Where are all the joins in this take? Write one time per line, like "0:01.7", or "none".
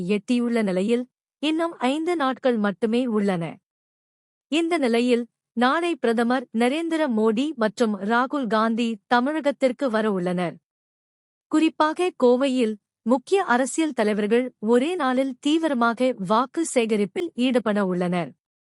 none